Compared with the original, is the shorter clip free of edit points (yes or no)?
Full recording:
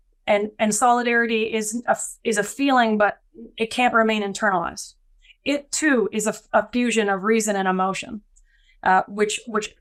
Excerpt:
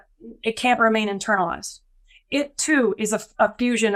yes